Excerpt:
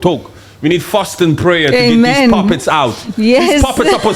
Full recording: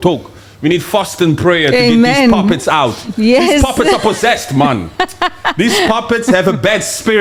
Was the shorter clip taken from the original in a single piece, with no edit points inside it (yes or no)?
yes